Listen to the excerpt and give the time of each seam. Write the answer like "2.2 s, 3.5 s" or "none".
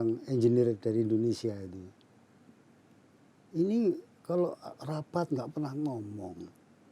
none

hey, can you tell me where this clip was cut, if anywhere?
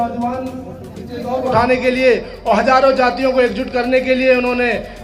1.5 s

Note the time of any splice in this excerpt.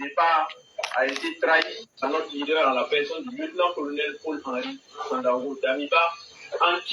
6.0 s

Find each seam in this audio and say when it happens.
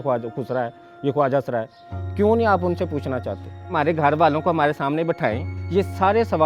3.7 s, 5.5 s

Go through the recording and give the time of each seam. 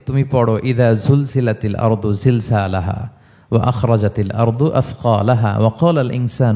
none

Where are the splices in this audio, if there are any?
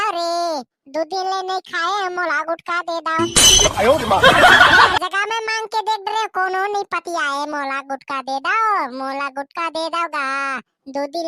none

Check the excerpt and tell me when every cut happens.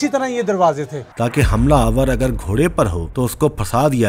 1.0 s

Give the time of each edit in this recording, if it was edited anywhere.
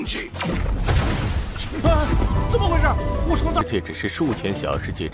3.6 s

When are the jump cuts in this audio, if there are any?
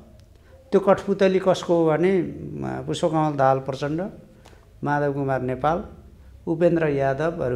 none

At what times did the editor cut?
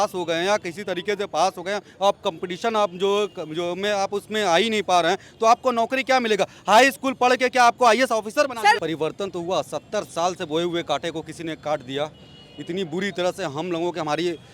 8.8 s

